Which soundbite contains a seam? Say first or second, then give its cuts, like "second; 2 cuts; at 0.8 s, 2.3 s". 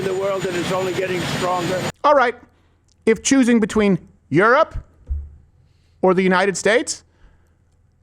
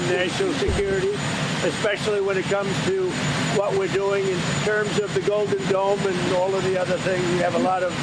first; 1 cut; at 1.9 s